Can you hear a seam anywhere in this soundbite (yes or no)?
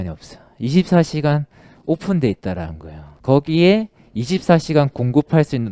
no